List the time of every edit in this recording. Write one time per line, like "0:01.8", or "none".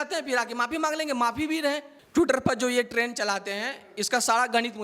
0:01.9

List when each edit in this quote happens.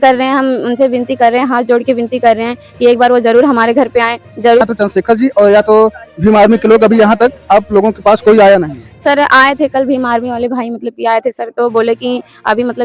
0:04.6

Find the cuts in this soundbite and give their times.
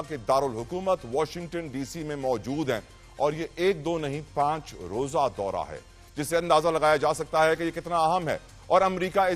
none

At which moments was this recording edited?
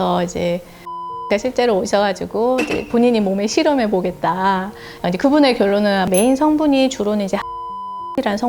0:04.8
0:06.1

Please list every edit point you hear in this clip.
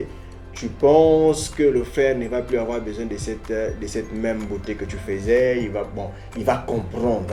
none

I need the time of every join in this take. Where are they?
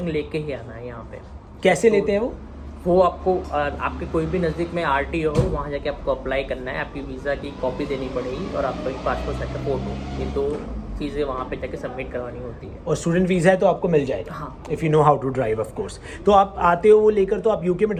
none

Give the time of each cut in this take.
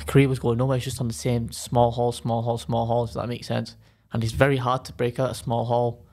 none

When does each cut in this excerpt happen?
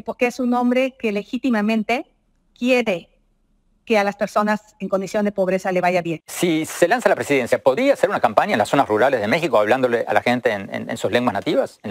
0:06.2

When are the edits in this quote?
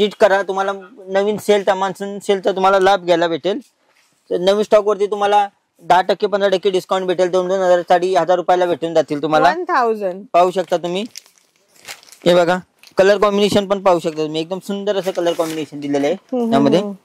none

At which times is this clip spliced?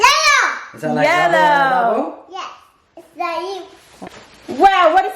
0:03.9

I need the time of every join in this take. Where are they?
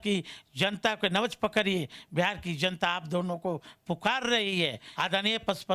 0:04.8

